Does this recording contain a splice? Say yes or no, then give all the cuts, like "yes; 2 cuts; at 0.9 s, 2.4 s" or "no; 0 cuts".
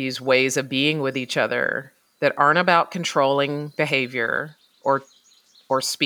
no; 0 cuts